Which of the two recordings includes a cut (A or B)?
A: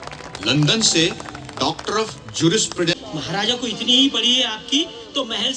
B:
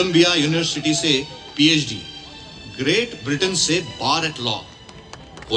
A